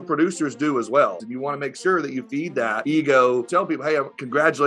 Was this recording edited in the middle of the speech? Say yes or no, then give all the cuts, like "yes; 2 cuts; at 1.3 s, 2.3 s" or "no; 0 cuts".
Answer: yes; 3 cuts; at 1.2 s, 2.8 s, 4.0 s